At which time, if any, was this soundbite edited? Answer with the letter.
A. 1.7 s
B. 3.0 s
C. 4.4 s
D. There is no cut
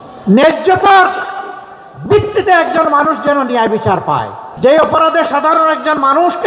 C